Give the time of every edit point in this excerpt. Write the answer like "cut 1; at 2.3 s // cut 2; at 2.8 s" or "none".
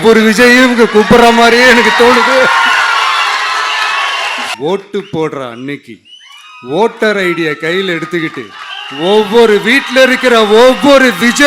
cut 1; at 4.5 s